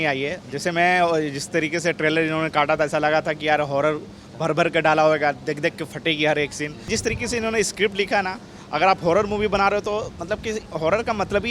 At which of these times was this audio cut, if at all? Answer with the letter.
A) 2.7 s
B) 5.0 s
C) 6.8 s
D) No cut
C